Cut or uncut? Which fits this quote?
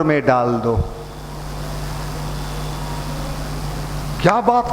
uncut